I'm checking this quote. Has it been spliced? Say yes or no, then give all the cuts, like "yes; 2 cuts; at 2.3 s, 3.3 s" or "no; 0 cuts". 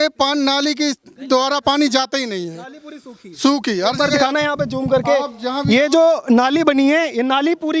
no; 0 cuts